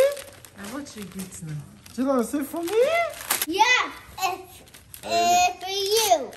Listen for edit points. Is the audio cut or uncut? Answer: cut